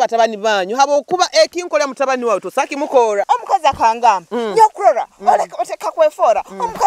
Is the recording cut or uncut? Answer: cut